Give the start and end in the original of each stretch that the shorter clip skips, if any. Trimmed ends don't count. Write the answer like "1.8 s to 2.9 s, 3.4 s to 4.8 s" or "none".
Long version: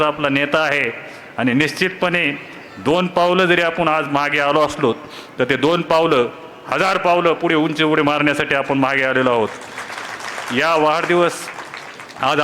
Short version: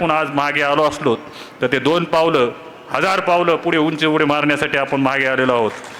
none